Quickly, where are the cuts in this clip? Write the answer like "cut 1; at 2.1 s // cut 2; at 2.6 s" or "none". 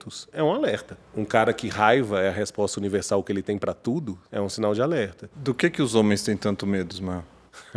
cut 1; at 1.0 s // cut 2; at 4.2 s